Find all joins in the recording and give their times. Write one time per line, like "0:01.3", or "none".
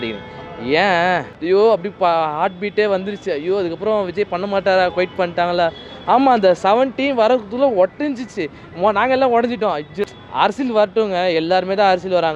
0:01.3
0:10.2